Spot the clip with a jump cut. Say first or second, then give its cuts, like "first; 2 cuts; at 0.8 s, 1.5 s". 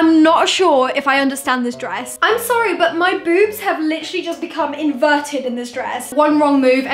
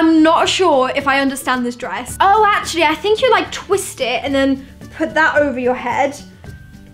first; 2 cuts; at 2.1 s, 6.1 s